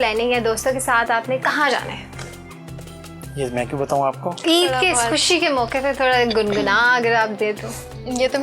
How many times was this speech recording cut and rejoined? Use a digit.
1